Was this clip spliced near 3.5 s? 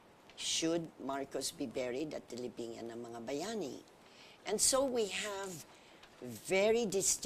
no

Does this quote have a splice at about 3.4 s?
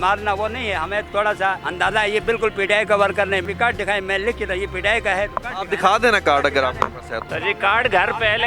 yes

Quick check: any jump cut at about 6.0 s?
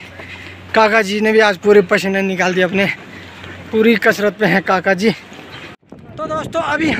yes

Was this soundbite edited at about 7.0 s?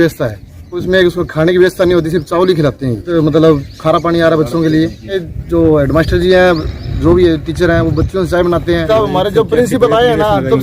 no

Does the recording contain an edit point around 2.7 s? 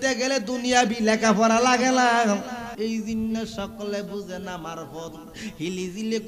yes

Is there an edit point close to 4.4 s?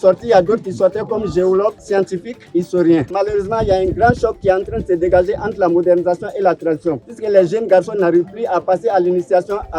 no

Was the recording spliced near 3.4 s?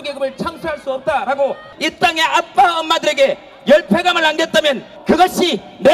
no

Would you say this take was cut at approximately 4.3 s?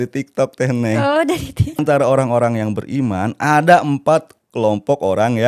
no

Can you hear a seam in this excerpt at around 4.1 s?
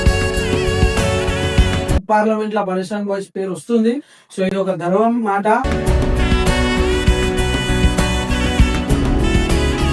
no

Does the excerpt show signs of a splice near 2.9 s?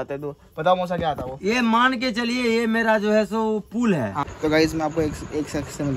no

